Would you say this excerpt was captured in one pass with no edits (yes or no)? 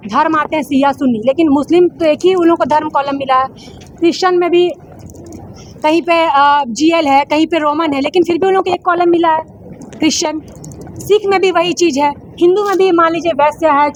yes